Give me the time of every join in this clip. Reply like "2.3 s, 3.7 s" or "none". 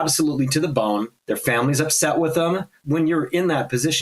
1.1 s, 2.8 s